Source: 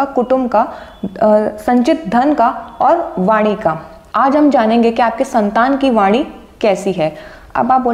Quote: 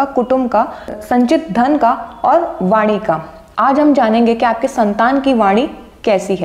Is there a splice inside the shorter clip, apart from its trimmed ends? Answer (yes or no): yes